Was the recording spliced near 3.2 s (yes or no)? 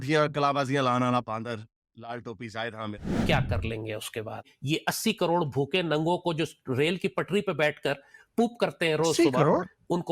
yes